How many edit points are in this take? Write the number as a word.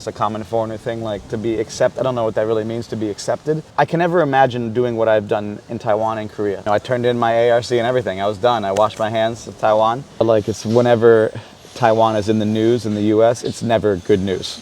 three